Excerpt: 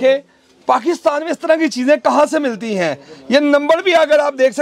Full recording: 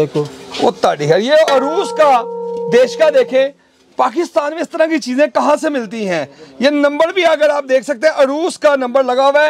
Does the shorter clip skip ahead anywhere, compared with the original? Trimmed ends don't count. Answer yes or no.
no